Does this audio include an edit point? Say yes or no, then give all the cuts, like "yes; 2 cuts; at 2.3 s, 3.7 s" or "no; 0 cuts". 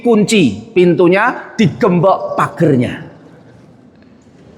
no; 0 cuts